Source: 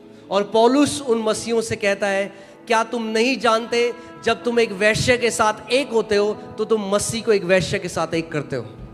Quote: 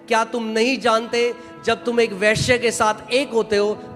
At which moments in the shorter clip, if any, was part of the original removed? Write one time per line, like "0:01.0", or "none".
none